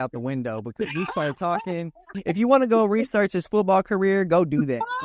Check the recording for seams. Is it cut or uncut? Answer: cut